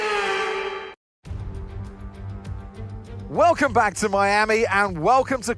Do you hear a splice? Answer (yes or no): yes